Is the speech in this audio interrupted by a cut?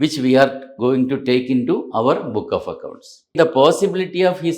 yes; 1 cut; at 3.3 s

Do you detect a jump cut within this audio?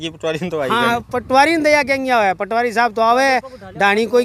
no; 0 cuts

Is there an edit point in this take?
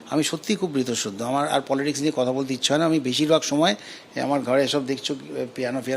no; 0 cuts

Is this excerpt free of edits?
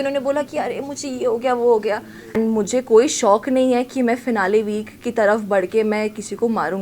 no; 1 cut; at 2.3 s

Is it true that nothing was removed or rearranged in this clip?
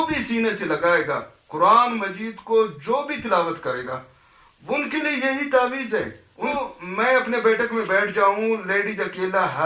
no; 1 cut; at 6.5 s

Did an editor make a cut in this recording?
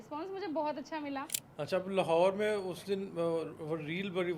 yes; 1 cut; at 1.4 s

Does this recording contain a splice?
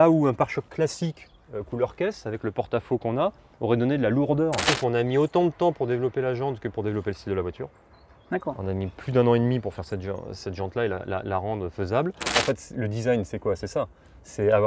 yes; 2 cuts; at 4.7 s, 12.2 s

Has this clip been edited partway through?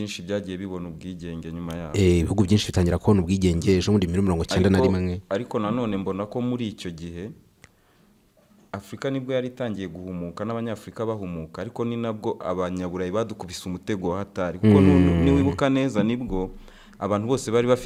no; 0 cuts

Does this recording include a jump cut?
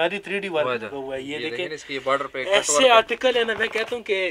no; 0 cuts

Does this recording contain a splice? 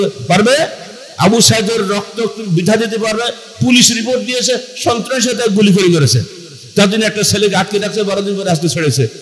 no; 0 cuts

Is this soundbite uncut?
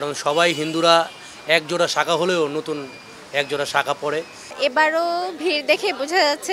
no; 1 cut; at 4.5 s

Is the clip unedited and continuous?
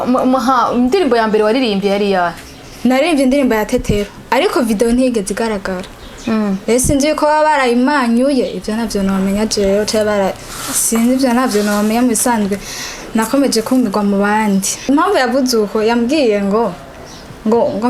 no; 1 cut; at 14.8 s

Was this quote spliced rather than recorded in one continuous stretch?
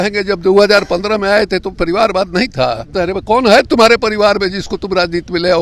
yes; 1 cut; at 2.9 s

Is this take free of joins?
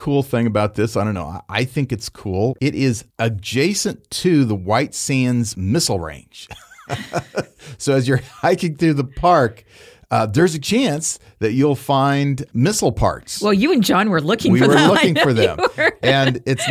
no; 1 cut; at 2.6 s

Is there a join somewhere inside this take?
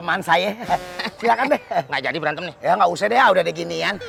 no; 0 cuts

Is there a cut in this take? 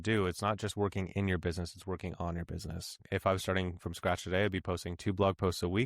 yes; 1 cut; at 3.0 s

